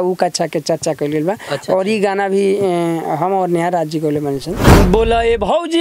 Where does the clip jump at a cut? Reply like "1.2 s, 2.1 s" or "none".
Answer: 4.6 s